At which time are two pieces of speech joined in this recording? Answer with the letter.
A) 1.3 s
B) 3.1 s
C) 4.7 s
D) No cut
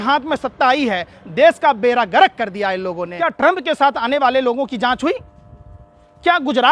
B